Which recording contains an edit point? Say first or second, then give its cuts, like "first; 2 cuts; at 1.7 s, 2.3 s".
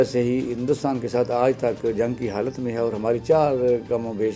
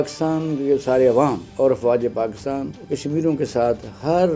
second; 2 cuts; at 1.4 s, 2.8 s